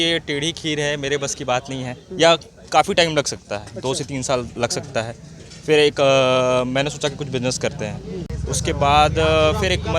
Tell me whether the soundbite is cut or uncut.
cut